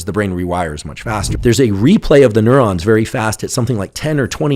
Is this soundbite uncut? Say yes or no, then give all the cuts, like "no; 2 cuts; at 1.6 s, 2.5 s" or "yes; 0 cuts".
no; 1 cut; at 1.3 s